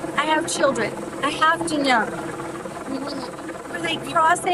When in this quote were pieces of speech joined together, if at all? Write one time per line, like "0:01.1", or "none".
none